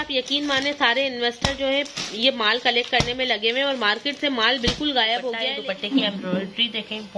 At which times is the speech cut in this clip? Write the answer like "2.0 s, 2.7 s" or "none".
5.5 s